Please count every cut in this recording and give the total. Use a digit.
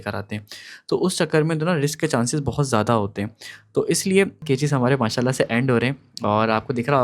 1